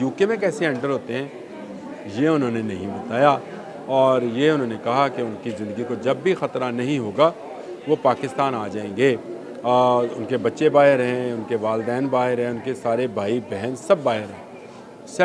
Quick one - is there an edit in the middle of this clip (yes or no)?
no